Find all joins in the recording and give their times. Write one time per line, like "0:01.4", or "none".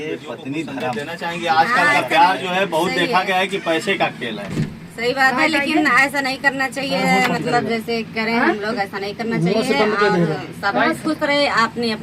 0:01.1